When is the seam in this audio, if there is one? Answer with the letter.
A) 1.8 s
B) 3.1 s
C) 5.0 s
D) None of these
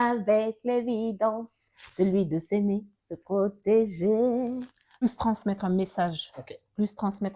C